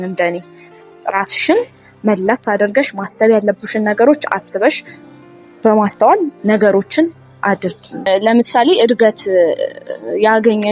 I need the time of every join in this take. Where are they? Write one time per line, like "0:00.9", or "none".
0:08.0